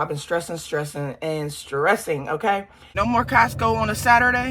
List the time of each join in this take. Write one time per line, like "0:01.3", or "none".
0:02.9